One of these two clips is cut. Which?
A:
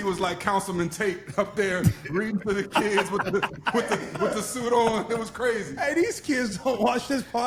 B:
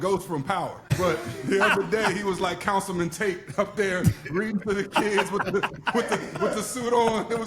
B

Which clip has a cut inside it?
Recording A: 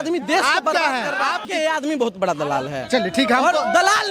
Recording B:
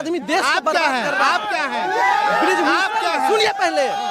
A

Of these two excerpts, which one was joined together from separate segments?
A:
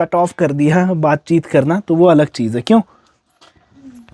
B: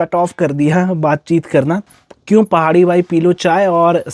B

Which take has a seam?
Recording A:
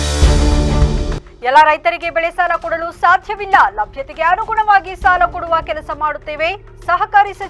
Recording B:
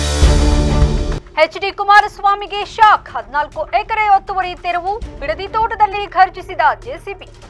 A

